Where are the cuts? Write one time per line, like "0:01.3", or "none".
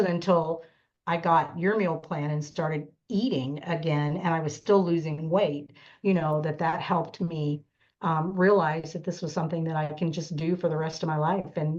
none